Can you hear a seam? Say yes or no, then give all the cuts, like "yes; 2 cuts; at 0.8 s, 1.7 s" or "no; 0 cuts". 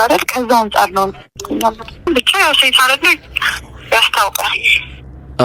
yes; 1 cut; at 2.1 s